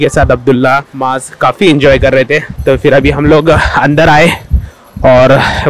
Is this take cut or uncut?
uncut